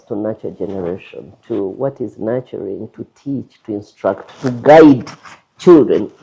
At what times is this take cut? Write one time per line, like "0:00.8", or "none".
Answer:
none